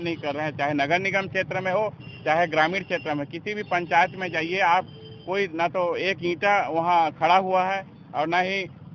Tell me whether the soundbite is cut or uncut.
uncut